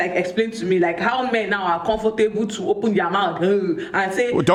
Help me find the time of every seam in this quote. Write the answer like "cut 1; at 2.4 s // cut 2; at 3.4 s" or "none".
none